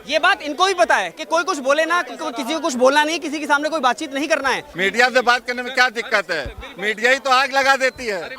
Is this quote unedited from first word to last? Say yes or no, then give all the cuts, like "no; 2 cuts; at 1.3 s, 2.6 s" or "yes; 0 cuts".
no; 1 cut; at 4.7 s